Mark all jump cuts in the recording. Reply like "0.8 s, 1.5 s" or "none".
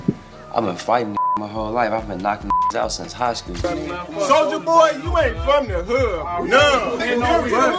3.5 s